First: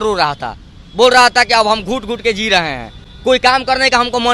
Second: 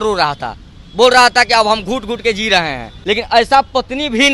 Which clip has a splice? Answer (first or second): second